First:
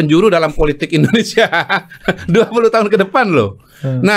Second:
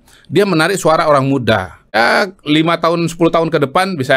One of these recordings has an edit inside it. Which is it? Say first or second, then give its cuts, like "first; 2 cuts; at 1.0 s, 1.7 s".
second; 1 cut; at 1.9 s